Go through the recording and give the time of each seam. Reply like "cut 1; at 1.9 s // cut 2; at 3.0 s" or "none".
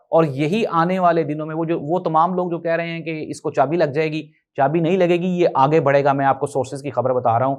none

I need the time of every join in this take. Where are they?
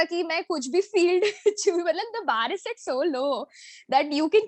none

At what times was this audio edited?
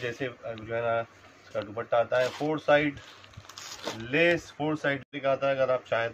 cut 1; at 5.1 s

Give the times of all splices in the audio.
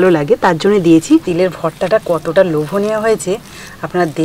cut 1; at 1.3 s

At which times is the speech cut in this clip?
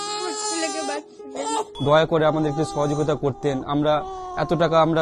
cut 1; at 1.7 s

